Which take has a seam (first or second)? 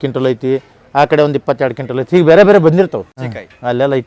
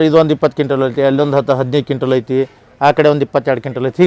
first